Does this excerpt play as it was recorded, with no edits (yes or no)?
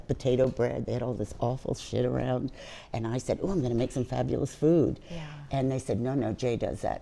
yes